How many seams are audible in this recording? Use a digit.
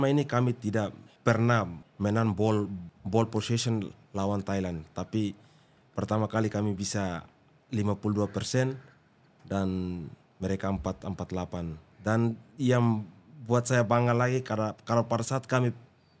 3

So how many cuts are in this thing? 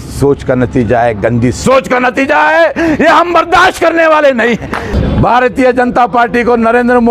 1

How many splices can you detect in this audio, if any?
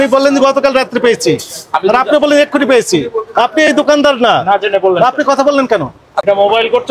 1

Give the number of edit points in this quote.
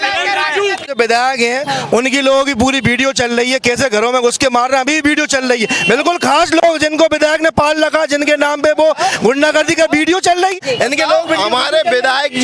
2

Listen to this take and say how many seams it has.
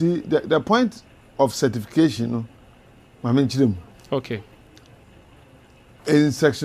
0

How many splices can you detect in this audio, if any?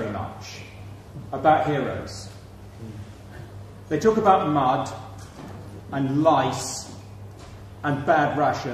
1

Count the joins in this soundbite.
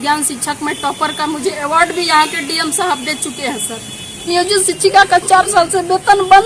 1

